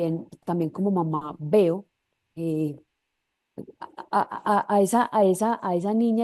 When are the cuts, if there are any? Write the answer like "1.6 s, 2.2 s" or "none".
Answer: none